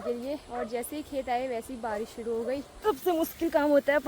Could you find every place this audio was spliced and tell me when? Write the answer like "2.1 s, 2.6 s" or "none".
2.7 s